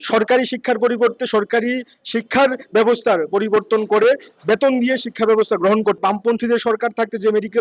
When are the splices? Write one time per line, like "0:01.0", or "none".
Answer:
0:06.0

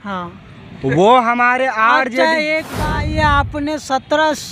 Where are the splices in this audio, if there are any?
0:02.8

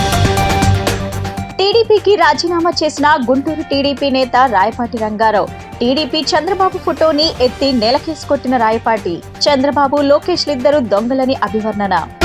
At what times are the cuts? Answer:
0:01.4

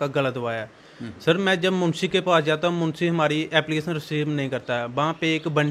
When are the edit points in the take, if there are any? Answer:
none

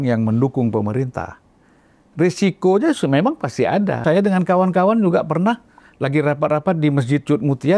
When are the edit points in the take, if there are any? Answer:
0:04.0

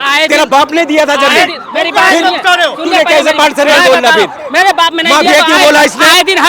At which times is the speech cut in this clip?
none

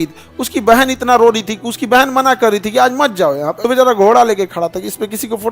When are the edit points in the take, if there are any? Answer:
0:03.5

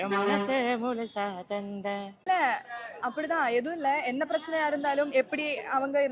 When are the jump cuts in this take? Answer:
0:02.3

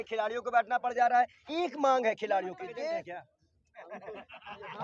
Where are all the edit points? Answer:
0:03.0

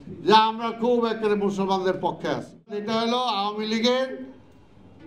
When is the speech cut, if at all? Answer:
0:02.8

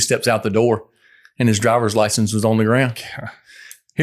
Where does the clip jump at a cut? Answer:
none

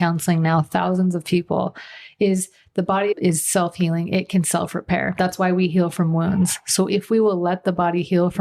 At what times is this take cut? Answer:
0:03.1

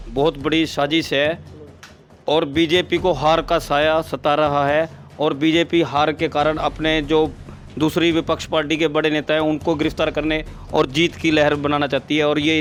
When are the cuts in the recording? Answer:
none

